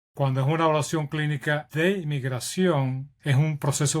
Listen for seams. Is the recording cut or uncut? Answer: cut